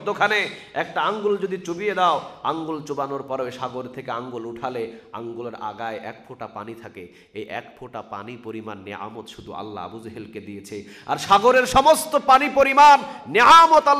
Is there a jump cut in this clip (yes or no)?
no